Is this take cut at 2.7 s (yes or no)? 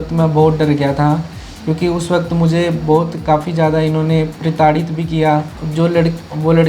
no